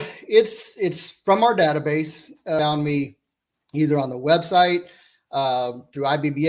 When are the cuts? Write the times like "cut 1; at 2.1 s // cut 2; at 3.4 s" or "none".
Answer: cut 1; at 2.6 s